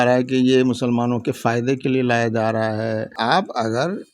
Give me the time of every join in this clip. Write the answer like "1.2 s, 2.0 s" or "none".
3.1 s